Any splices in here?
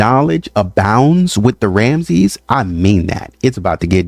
no; 0 cuts

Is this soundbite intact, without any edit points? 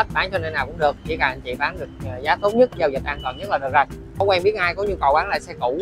no; 1 cut; at 4.2 s

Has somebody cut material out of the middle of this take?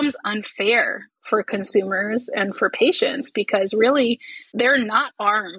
no; 0 cuts

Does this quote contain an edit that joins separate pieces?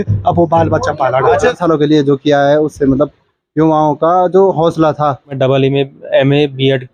yes; 2 cuts; at 1.6 s, 5.4 s

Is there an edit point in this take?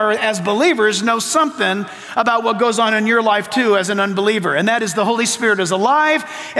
no; 0 cuts

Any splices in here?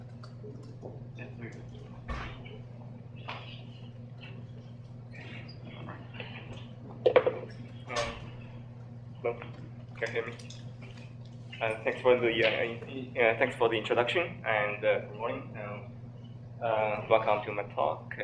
yes; 1 cut; at 7.2 s

